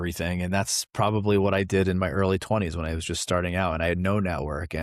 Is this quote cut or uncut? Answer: uncut